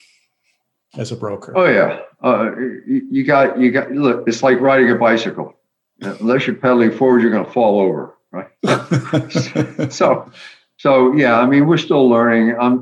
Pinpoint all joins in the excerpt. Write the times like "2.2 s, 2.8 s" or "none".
none